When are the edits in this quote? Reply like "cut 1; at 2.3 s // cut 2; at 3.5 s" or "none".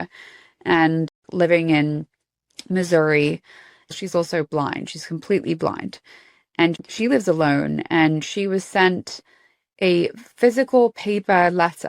cut 1; at 1.2 s // cut 2; at 3.9 s